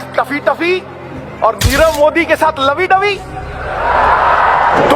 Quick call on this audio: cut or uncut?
uncut